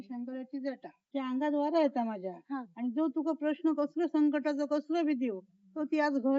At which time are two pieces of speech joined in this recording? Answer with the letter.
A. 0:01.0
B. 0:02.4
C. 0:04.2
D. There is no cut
A